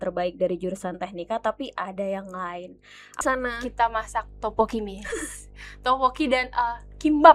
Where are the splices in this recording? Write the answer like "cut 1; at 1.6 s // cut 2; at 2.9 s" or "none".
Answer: cut 1; at 3.2 s